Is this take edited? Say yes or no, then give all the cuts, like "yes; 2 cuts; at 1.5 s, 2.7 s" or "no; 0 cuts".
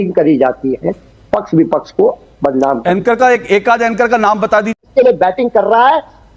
yes; 1 cut; at 4.8 s